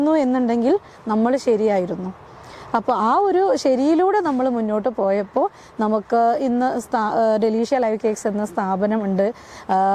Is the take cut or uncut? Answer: uncut